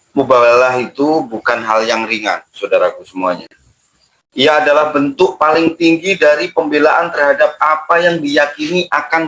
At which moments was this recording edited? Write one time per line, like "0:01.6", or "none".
none